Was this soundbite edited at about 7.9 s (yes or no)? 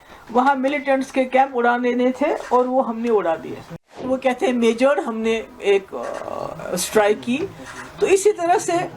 no